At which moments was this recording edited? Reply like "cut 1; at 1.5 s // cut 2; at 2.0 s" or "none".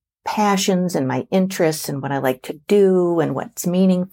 none